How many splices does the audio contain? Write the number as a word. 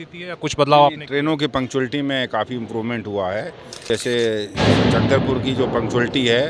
one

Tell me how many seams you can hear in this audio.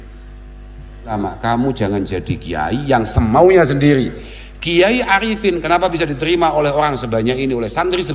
one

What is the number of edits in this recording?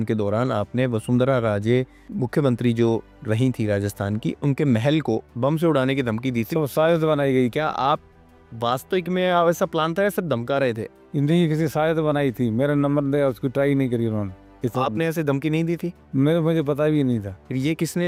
zero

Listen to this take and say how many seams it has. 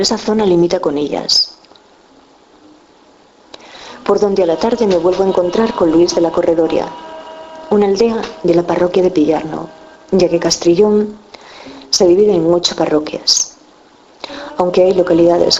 one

